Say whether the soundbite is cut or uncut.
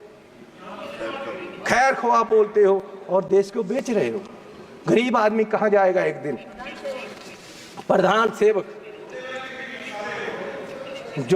uncut